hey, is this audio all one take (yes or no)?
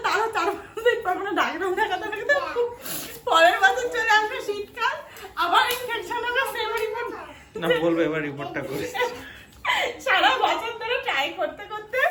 yes